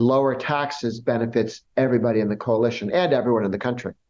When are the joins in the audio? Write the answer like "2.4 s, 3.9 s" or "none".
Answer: none

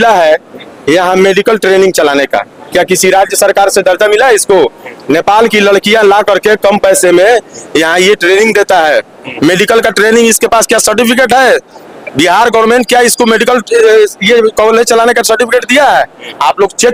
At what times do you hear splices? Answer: none

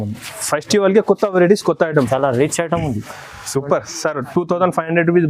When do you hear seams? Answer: 2.1 s

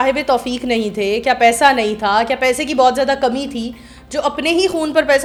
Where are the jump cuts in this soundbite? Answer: none

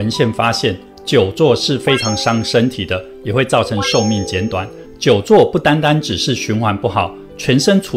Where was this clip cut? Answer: 4.8 s

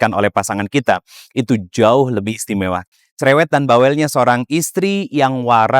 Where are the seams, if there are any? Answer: 2.8 s

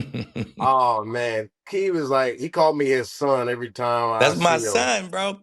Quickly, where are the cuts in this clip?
none

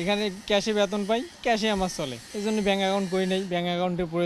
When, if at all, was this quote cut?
1.3 s, 2.2 s

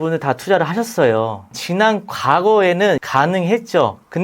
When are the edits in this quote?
1.5 s, 3.0 s

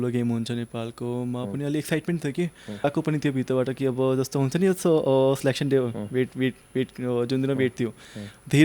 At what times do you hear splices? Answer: 2.8 s

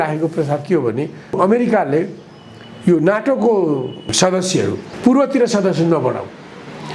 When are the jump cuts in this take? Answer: 1.4 s, 4.4 s

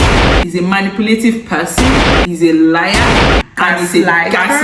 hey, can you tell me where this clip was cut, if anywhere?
none

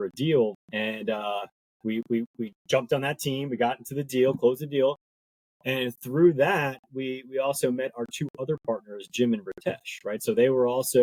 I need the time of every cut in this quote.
none

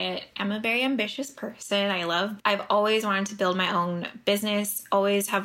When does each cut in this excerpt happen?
2.3 s

